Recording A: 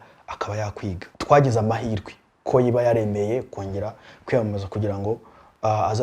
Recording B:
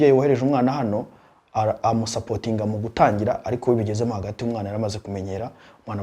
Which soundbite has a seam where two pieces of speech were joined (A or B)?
A